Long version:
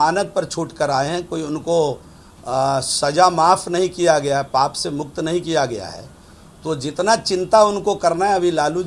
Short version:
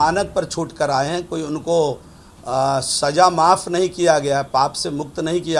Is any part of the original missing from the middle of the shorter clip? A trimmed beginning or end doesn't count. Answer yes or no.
no